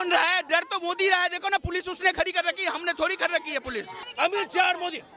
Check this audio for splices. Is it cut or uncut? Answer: cut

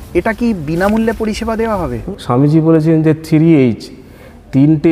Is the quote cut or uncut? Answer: cut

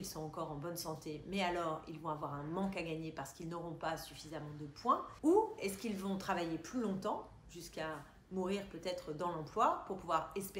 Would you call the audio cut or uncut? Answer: cut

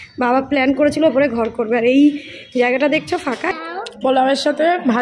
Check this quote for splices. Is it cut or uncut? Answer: cut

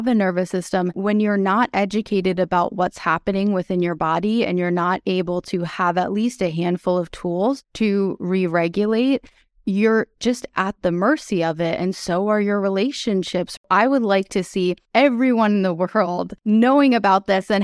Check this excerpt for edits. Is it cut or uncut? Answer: cut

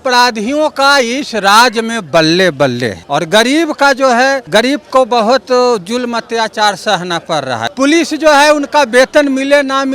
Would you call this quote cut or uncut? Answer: cut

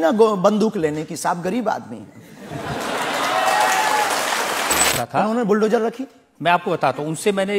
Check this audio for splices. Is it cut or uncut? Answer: cut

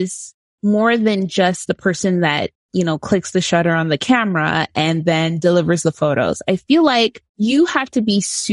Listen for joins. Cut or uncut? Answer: cut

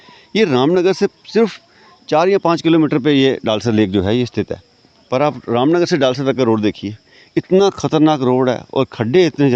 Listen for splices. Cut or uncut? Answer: uncut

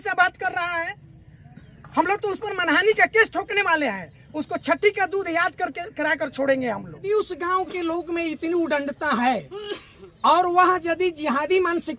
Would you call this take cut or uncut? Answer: cut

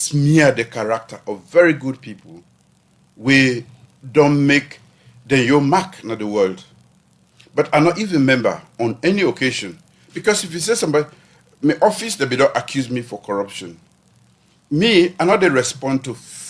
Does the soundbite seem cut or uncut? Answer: cut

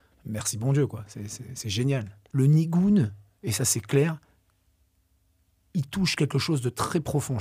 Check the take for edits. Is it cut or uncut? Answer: cut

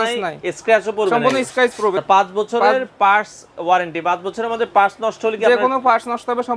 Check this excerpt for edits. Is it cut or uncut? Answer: cut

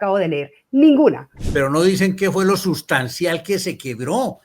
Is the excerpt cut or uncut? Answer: cut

